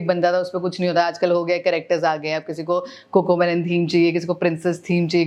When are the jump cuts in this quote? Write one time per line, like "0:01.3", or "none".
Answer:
none